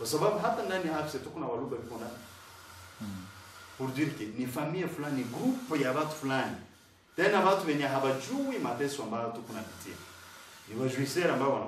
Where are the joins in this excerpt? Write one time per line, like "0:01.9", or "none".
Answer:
none